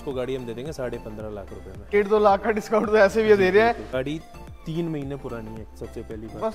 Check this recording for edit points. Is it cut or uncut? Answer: cut